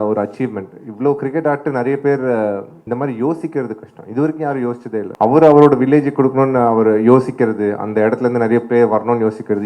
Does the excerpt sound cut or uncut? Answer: cut